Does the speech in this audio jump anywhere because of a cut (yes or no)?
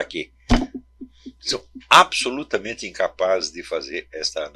no